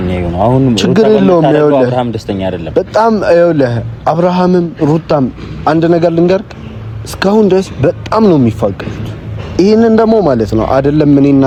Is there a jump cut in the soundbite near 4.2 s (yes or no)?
no